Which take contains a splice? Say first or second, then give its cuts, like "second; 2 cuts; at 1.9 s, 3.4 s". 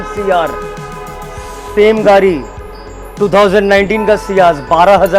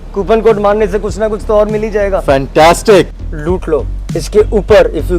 second; 1 cut; at 3.1 s